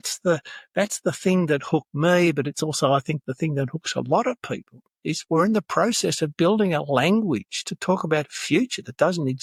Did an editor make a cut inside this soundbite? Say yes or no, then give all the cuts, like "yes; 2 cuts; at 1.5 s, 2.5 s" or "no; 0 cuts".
no; 0 cuts